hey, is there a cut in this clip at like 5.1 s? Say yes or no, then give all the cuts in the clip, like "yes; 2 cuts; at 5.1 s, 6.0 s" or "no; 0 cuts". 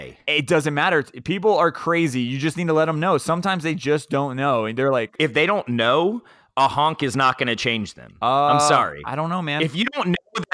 yes; 1 cut; at 5.1 s